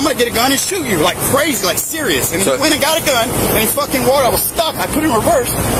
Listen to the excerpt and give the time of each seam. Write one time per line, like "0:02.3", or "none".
none